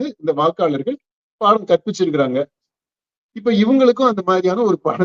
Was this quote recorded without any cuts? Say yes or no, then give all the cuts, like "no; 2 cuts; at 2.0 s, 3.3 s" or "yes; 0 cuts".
yes; 0 cuts